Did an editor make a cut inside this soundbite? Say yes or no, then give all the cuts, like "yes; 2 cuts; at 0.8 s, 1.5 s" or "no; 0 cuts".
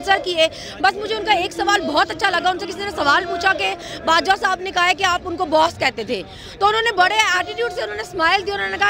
no; 0 cuts